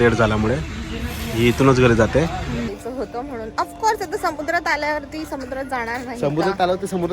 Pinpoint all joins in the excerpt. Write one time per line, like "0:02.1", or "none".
0:02.8